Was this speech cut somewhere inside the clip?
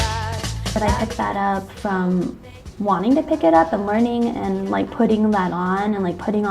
yes; 1 cut; at 4.7 s

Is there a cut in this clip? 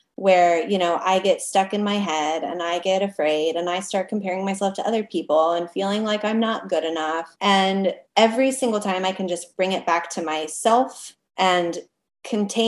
yes; 1 cut; at 8.0 s

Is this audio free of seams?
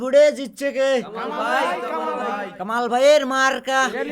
no; 1 cut; at 1.0 s

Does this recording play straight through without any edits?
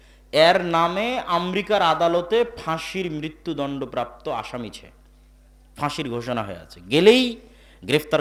yes; 0 cuts

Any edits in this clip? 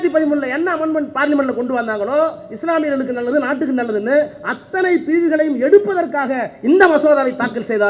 no; 0 cuts

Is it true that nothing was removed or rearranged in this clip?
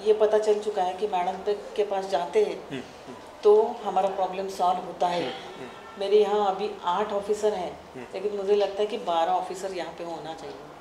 no; 1 cut; at 5.5 s

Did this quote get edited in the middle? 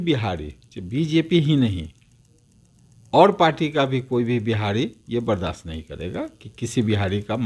no; 0 cuts

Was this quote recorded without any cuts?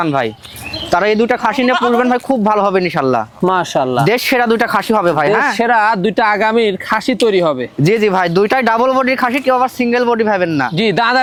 yes; 0 cuts

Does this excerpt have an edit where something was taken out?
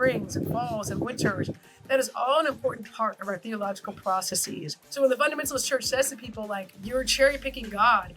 yes; 2 cuts; at 4.8 s, 6.7 s

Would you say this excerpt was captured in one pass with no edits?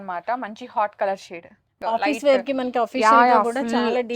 no; 1 cut; at 1.8 s

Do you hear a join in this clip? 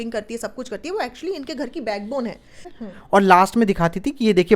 yes; 1 cut; at 2.7 s

